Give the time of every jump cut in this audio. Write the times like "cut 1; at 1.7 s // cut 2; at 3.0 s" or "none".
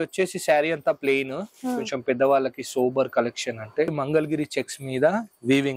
cut 1; at 3.9 s